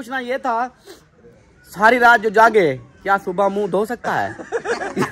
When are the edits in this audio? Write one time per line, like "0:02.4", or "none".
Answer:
none